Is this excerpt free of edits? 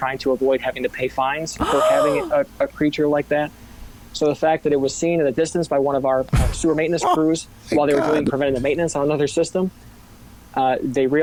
yes; 0 cuts

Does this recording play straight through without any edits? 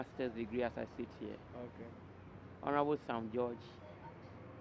yes; 0 cuts

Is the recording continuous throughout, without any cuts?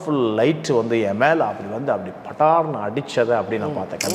yes; 0 cuts

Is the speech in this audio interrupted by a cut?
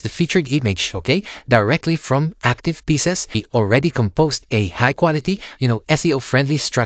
yes; 1 cut; at 3.4 s

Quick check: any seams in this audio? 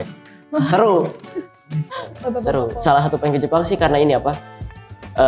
yes; 1 cut; at 2.7 s

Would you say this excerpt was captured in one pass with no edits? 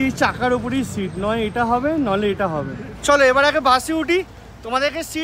yes; 0 cuts

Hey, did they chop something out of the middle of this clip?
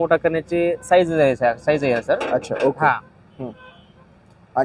no; 0 cuts

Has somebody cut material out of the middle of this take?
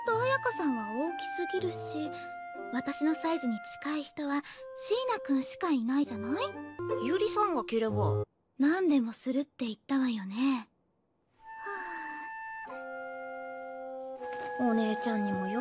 no; 0 cuts

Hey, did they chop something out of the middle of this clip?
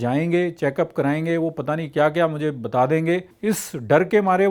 yes; 1 cut; at 3.3 s

